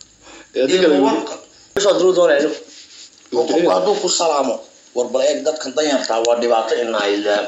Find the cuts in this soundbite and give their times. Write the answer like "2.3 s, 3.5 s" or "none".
1.8 s

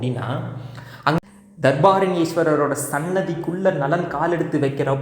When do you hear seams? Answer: 1.2 s

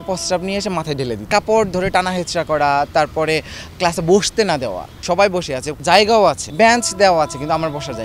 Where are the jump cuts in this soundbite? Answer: 1.2 s, 4.9 s, 5.7 s, 6.4 s

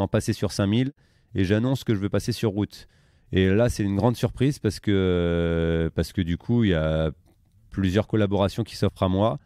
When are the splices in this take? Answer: none

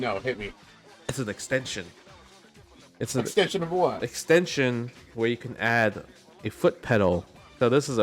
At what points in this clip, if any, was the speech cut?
none

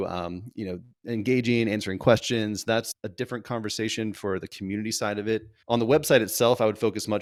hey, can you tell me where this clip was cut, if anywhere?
none

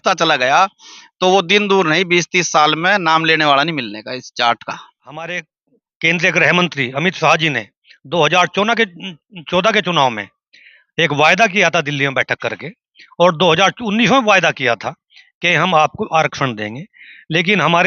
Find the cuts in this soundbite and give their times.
5.2 s

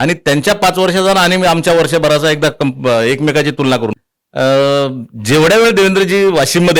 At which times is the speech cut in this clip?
4.0 s

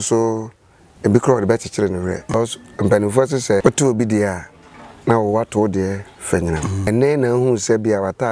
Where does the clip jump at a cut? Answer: 2.3 s, 3.6 s, 6.9 s

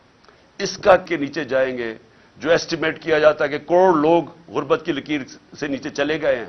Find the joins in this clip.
1.1 s

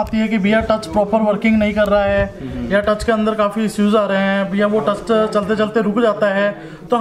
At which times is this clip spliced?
none

